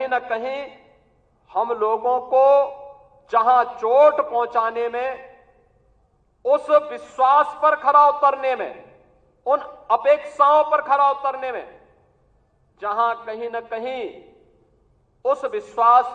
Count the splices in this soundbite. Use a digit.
0